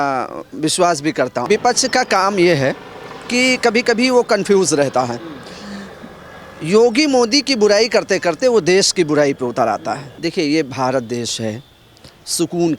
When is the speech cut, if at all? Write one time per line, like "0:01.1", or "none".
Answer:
0:01.5
0:10.1